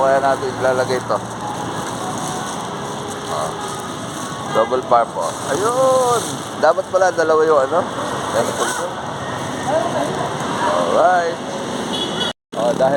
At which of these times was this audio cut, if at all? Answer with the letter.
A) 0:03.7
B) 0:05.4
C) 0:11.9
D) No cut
D